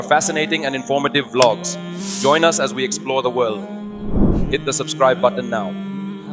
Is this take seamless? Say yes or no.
yes